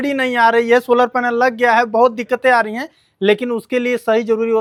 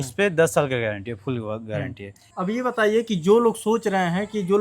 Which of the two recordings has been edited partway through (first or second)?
second